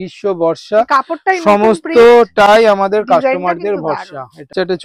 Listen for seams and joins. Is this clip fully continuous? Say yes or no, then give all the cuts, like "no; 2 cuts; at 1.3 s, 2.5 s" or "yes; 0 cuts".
yes; 0 cuts